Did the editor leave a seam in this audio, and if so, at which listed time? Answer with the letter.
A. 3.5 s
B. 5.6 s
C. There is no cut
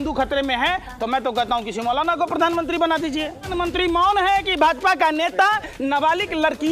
A